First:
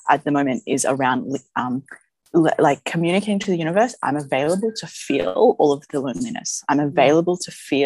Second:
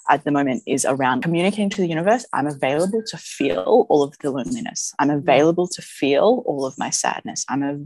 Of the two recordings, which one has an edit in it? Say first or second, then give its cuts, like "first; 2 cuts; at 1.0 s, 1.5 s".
second; 1 cut; at 1.2 s